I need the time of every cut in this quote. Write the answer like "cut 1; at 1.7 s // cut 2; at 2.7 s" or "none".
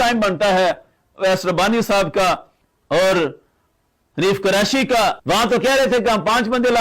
cut 1; at 5.0 s

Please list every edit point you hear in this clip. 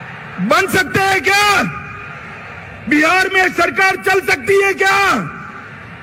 none

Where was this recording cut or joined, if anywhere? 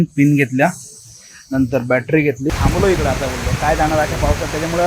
cut 1; at 2.6 s

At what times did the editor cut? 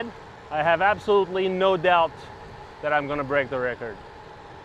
none

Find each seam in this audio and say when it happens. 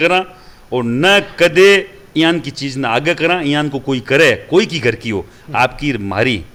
none

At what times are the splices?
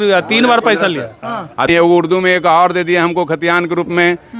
cut 1; at 1.7 s

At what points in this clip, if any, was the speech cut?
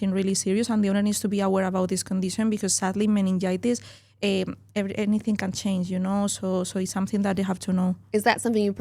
none

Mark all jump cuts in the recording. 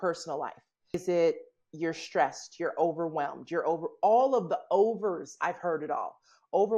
cut 1; at 0.9 s

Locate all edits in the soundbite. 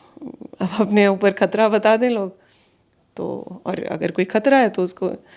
none

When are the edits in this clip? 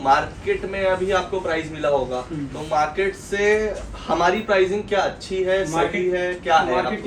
none

